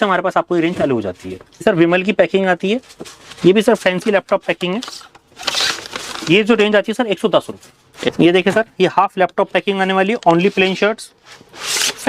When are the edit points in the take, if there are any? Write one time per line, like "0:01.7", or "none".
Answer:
0:01.6
0:08.1